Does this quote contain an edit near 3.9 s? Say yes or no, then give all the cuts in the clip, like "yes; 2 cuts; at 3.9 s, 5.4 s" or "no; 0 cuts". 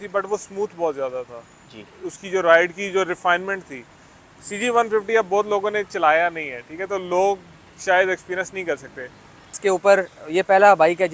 no; 1 cut; at 9.6 s